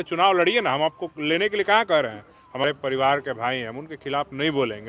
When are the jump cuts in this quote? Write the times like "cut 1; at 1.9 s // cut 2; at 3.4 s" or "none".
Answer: cut 1; at 2.6 s

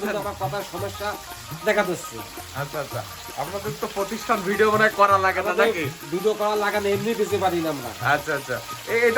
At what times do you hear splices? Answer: cut 1; at 2.3 s

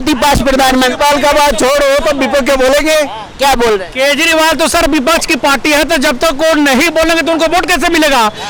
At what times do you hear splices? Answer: none

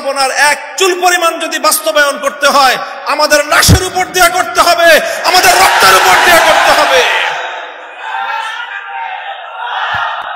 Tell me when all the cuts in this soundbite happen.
none

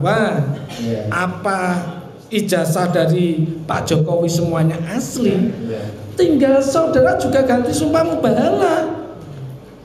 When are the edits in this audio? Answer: none

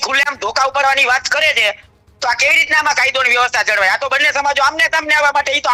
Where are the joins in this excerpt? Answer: none

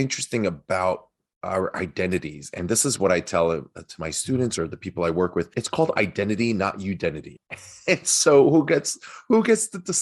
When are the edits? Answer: cut 1; at 5.6 s // cut 2; at 7.3 s

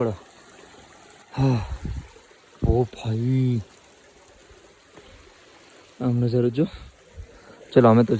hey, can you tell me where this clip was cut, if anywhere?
none

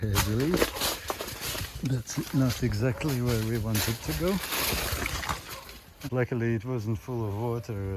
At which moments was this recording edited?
cut 1; at 6.1 s

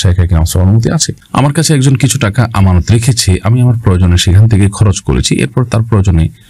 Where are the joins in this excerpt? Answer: cut 1; at 1.2 s

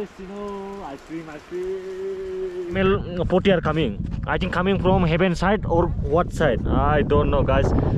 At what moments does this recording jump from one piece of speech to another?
cut 1; at 2.8 s

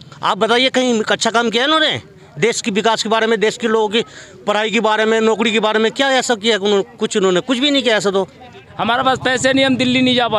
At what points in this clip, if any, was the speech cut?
cut 1; at 8.7 s

